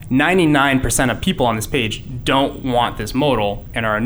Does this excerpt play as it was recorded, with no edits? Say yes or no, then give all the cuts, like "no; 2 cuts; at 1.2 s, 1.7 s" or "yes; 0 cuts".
yes; 0 cuts